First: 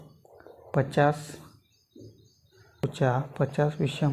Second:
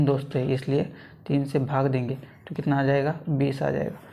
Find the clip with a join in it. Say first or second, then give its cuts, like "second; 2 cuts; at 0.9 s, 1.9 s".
first; 1 cut; at 2.7 s